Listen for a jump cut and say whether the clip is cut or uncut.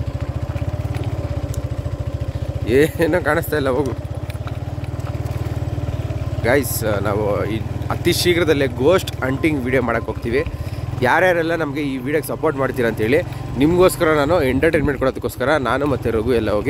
uncut